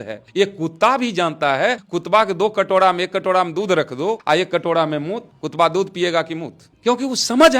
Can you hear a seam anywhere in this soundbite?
yes; 2 cuts; at 1.9 s, 4.2 s

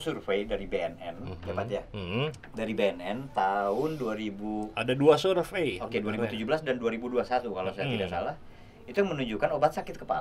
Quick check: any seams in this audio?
no; 0 cuts

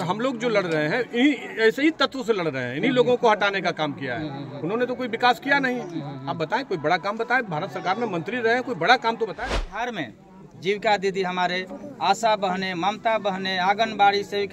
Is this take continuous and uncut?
no; 1 cut; at 9.7 s

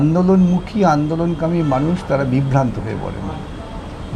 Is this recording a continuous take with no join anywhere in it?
yes; 0 cuts

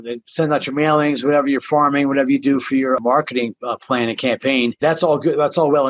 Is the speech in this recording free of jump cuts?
no; 2 cuts; at 3.0 s, 4.8 s

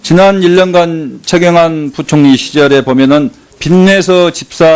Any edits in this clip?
yes; 1 cut; at 3.8 s

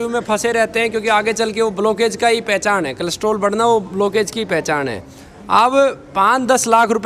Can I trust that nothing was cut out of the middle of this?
yes; 0 cuts

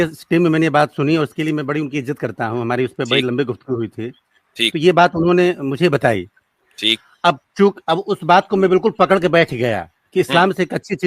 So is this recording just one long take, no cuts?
yes; 0 cuts

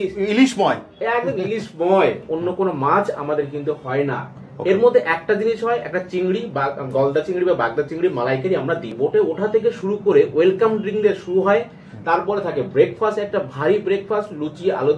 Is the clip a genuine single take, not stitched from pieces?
no; 2 cuts; at 2.2 s, 8.9 s

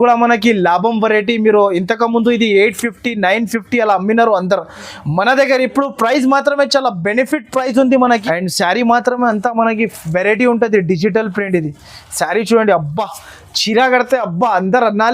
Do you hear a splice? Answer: yes; 1 cut; at 8.2 s

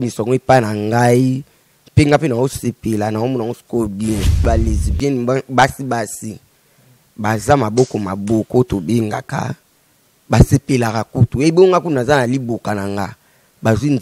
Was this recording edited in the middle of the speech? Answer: yes; 1 cut; at 4.4 s

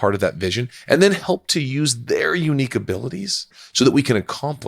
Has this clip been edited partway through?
yes; 1 cut; at 3.6 s

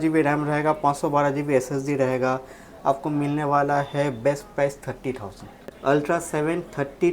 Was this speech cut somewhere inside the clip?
yes; 1 cut; at 5.6 s

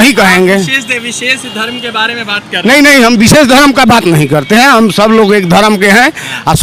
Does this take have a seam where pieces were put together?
no; 0 cuts

